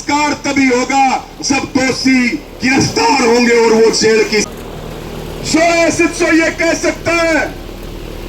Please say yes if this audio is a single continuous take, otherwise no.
no